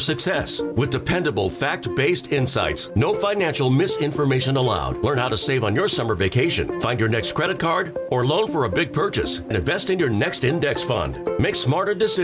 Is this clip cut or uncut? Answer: uncut